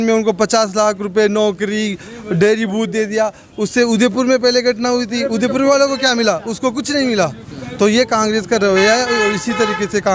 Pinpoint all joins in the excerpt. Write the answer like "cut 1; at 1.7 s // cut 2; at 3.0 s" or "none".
none